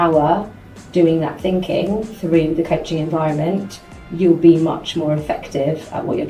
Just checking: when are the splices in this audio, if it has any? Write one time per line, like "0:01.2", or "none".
none